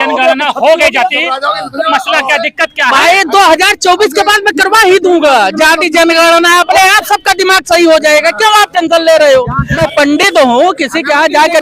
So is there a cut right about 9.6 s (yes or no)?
yes